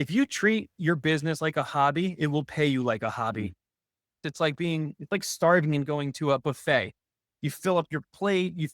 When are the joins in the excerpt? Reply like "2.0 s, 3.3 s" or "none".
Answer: 4.2 s